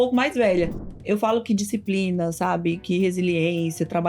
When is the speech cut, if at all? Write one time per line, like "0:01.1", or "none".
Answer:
0:01.0